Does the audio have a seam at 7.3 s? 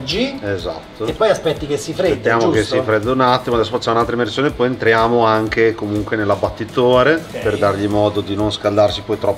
no; 0 cuts

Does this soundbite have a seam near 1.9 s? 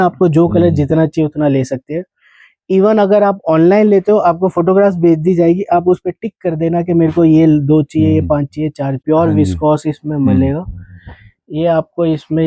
no; 1 cut; at 9.0 s

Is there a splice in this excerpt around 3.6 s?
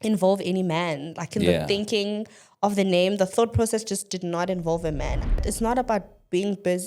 no; 1 cut; at 5.4 s

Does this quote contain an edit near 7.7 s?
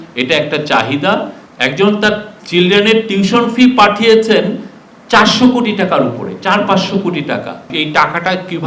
yes; 2 cuts; at 1.4 s, 7.7 s

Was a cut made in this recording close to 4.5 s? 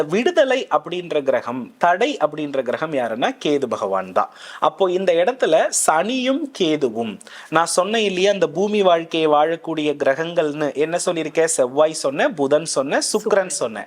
no; 0 cuts

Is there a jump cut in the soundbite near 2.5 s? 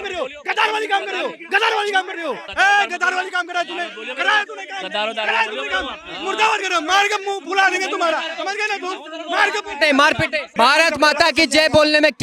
yes; 2 cuts; at 2.5 s, 10.5 s

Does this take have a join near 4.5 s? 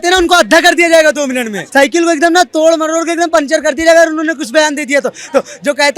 no; 1 cut; at 1.6 s

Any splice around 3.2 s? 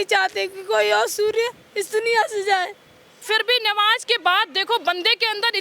yes; 1 cut; at 3.2 s

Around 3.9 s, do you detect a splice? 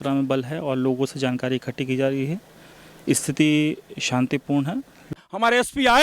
no; 1 cut; at 5.1 s

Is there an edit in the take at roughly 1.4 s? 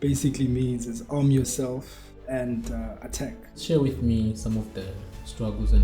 no; 1 cut; at 3.5 s

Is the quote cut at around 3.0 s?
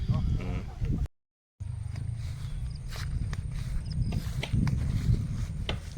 no; 1 cut; at 1.0 s

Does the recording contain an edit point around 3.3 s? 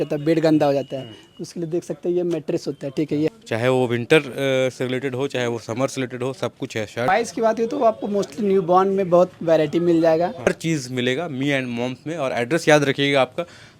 yes; 3 cuts; at 3.3 s, 7.0 s, 10.5 s

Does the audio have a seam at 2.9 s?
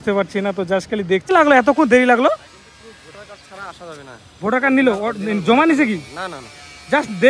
no; 1 cut; at 1.3 s

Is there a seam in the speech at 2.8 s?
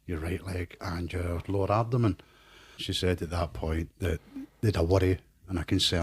yes; 1 cut; at 2.8 s

